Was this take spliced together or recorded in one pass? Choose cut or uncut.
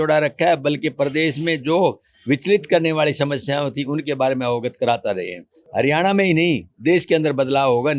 cut